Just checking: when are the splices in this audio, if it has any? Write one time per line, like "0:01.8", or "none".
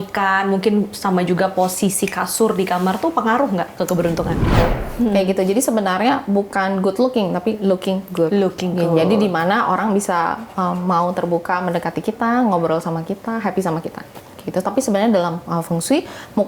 0:04.6
0:14.3